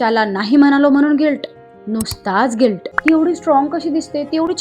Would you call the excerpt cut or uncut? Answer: cut